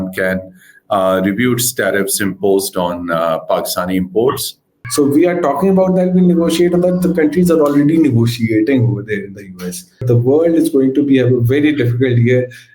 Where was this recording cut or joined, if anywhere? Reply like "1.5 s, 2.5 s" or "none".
4.8 s, 10.0 s